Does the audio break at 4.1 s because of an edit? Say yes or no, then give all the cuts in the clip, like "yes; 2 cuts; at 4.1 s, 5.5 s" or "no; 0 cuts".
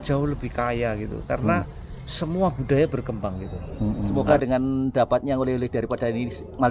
yes; 1 cut; at 4.1 s